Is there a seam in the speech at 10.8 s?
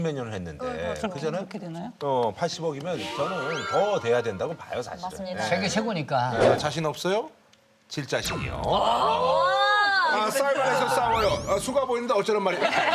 no; 1 cut; at 6.6 s

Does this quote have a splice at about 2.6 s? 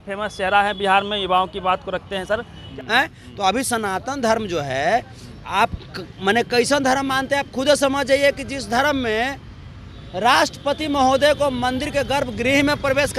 yes; 1 cut; at 2.6 s

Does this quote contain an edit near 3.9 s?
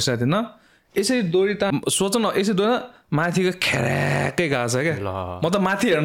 no; 1 cut; at 1.7 s

